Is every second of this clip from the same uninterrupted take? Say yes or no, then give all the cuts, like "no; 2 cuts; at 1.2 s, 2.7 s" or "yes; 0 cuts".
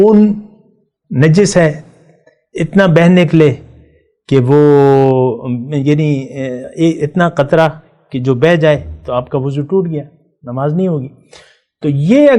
yes; 0 cuts